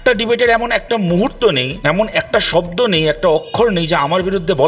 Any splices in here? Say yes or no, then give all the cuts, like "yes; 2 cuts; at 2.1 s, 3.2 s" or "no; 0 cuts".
yes; 1 cut; at 1.7 s